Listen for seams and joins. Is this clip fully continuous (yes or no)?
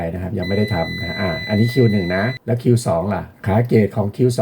no